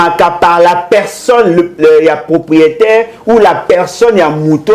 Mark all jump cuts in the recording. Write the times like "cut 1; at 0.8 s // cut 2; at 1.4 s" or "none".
none